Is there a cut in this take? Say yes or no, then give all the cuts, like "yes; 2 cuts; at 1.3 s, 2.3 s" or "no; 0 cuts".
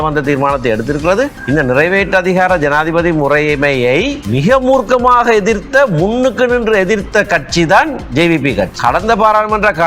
yes; 3 cuts; at 1.4 s, 4.2 s, 8.7 s